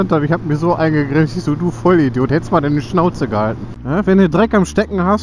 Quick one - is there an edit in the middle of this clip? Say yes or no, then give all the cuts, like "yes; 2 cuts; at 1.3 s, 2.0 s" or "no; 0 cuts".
yes; 1 cut; at 3.7 s